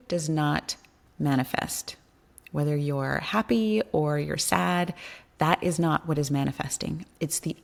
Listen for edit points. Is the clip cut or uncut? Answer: uncut